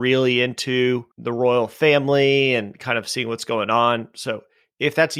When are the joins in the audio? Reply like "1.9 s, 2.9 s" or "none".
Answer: 1.2 s